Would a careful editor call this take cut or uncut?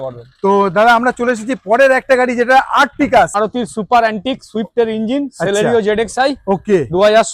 cut